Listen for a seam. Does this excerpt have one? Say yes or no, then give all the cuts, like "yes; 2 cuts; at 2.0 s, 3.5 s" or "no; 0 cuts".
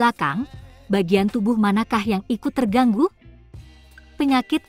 yes; 1 cut; at 3.7 s